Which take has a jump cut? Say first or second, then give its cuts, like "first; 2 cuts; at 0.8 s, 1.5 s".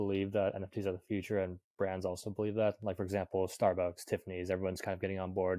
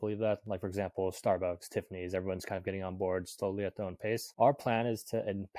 second; 1 cut; at 4.3 s